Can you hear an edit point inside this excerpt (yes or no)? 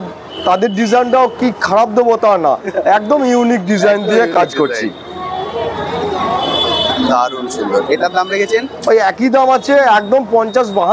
no